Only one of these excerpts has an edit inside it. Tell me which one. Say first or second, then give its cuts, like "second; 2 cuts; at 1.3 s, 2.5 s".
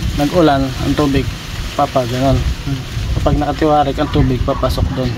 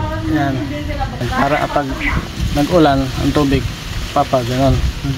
second; 1 cut; at 1.2 s